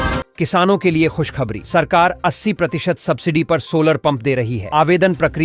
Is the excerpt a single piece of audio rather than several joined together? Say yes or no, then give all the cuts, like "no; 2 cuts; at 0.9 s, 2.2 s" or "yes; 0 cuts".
yes; 0 cuts